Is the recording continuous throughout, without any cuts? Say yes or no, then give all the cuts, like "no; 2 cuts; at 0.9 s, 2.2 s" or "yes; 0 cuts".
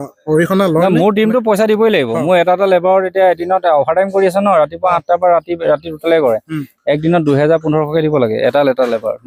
yes; 0 cuts